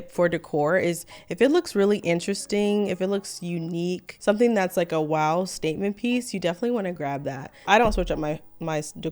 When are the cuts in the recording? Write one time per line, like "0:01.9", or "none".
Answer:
0:04.1
0:07.5